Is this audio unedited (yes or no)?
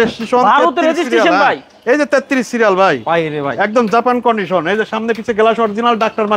yes